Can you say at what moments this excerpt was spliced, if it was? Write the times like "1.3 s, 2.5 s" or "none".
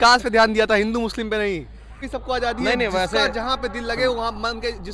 2.1 s